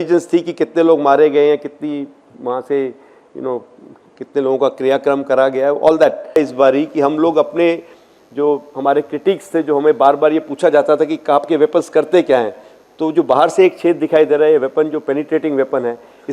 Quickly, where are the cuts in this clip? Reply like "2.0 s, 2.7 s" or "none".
6.4 s